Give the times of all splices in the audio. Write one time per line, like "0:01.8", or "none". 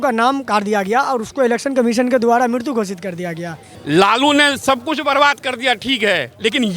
0:03.7